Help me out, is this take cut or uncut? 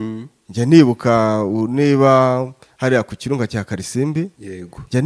uncut